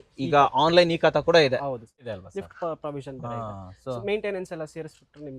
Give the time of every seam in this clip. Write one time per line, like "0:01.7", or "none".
0:02.1